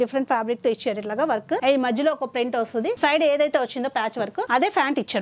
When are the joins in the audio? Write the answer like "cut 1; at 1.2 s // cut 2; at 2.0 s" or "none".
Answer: cut 1; at 1.6 s // cut 2; at 3.0 s // cut 3; at 4.4 s